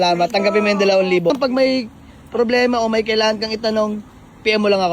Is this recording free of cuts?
no; 1 cut; at 1.3 s

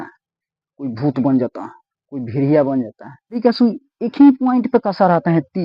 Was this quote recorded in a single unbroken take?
no; 1 cut; at 3.4 s

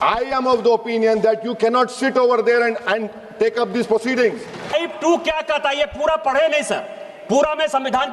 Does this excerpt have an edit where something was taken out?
yes; 1 cut; at 4.7 s

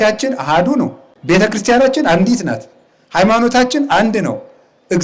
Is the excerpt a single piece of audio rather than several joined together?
no; 1 cut; at 1.1 s

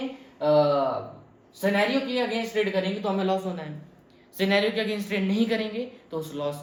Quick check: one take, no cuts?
yes; 0 cuts

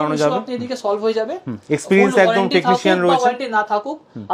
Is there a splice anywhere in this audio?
no; 0 cuts

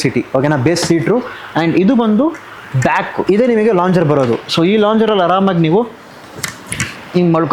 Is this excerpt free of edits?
yes; 0 cuts

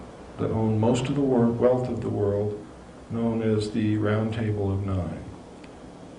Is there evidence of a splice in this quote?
no; 0 cuts

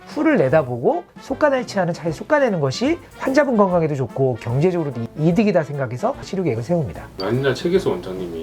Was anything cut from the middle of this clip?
yes; 2 cuts; at 6.3 s, 7.1 s

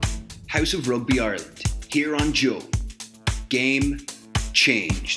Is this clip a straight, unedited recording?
yes; 0 cuts

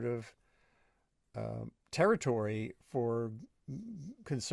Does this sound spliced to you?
no; 0 cuts

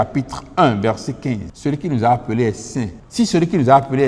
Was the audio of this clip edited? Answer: yes; 2 cuts; at 1.5 s, 3.0 s

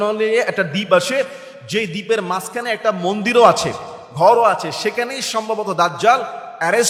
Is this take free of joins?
yes; 0 cuts

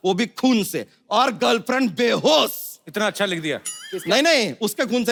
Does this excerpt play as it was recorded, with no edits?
yes; 0 cuts

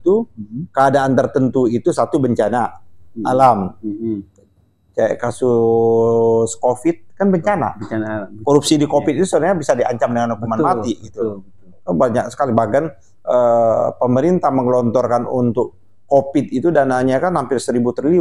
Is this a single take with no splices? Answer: yes; 0 cuts

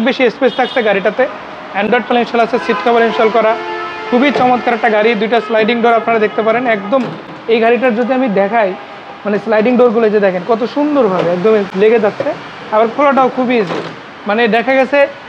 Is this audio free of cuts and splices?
yes; 0 cuts

